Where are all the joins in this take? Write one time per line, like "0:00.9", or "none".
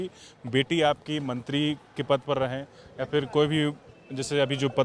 none

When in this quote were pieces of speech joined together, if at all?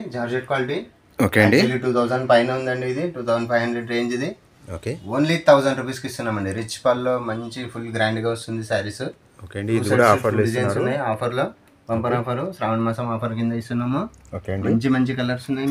none

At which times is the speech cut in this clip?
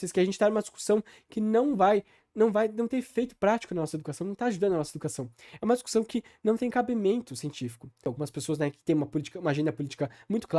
0:08.1

